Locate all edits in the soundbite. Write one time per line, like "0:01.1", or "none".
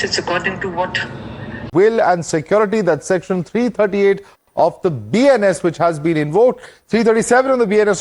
0:01.7